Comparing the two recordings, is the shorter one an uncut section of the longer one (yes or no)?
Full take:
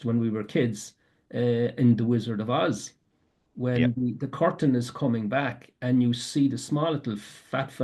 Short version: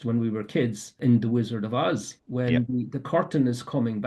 no